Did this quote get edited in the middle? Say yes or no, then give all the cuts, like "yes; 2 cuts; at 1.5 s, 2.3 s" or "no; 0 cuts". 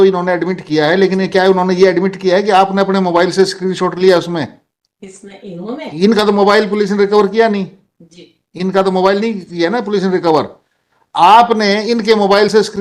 no; 0 cuts